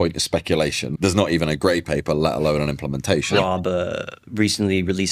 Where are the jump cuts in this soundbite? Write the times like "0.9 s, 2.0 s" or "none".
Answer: 0.9 s, 3.3 s